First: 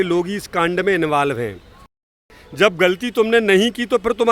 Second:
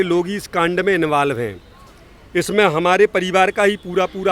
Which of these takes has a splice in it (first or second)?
first